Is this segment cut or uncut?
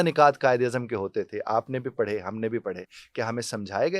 uncut